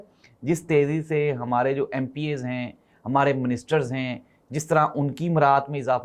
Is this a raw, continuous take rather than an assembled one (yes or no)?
yes